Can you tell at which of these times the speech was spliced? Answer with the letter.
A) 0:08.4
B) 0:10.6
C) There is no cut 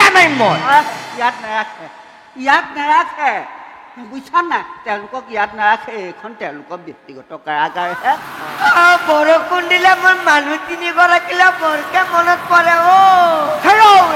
A